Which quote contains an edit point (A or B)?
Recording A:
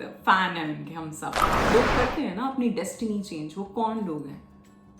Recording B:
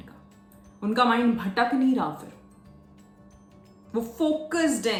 A